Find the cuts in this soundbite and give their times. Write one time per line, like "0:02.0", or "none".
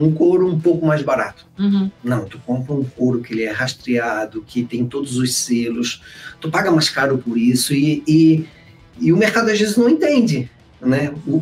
none